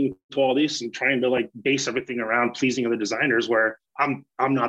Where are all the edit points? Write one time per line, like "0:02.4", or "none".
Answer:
none